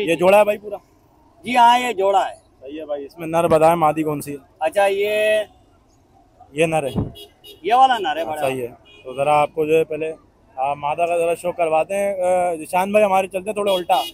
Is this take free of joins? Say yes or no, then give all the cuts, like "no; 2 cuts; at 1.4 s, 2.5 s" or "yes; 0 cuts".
yes; 0 cuts